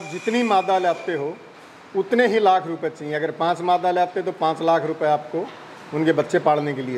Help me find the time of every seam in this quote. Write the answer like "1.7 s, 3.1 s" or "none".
none